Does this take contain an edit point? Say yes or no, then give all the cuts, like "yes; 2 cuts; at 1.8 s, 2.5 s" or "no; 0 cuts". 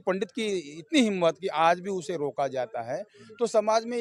no; 0 cuts